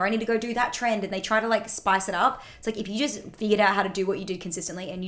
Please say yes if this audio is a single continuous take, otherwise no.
yes